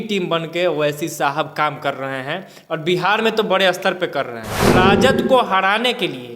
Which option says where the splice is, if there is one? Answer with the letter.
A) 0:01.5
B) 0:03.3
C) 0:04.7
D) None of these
C